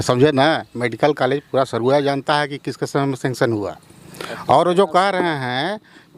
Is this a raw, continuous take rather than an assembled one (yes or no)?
yes